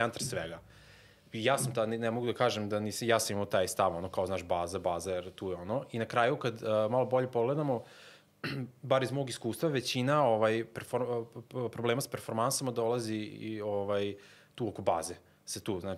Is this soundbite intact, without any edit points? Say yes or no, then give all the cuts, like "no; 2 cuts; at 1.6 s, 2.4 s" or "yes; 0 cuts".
yes; 0 cuts